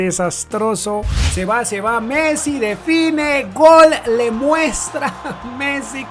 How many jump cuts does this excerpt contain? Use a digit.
1